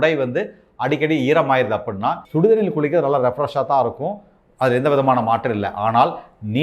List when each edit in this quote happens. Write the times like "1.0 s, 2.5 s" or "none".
2.2 s